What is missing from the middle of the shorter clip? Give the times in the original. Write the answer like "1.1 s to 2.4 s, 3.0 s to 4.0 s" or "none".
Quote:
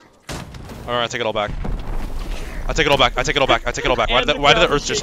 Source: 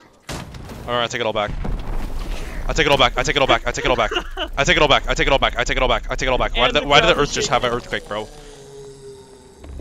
4.1 s to 6.5 s